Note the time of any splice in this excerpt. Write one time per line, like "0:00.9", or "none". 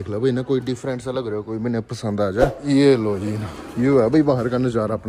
0:02.6